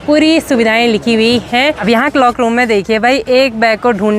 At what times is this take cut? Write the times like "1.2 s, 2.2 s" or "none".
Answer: 1.8 s